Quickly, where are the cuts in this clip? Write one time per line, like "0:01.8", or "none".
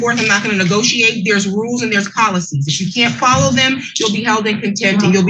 none